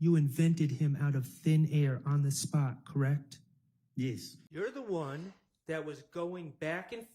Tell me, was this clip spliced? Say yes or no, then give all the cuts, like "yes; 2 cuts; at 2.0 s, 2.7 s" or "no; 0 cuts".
yes; 1 cut; at 4.4 s